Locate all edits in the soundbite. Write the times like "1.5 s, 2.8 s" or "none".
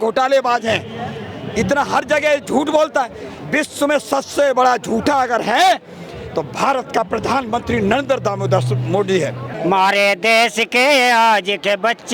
9.5 s